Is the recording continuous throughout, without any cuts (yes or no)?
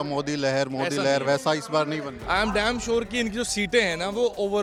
yes